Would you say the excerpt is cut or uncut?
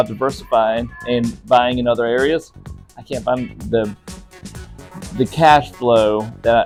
uncut